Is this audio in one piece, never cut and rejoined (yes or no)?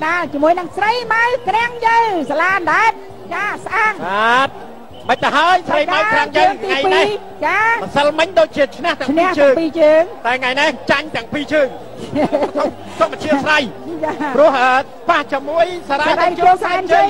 yes